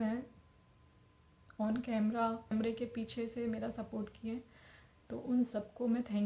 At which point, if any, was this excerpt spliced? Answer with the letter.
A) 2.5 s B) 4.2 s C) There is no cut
A